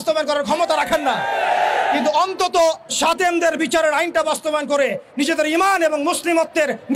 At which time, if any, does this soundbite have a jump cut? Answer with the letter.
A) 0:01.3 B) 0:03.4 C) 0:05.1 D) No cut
D